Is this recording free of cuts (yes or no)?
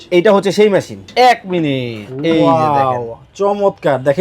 no